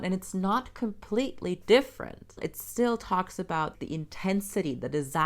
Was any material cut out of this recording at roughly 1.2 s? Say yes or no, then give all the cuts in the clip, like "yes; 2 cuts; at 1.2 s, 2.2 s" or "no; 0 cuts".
no; 2 cuts; at 2.4 s, 3.8 s